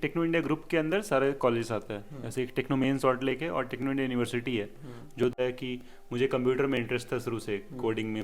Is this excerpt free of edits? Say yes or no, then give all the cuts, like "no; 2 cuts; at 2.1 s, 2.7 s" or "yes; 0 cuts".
no; 1 cut; at 5.3 s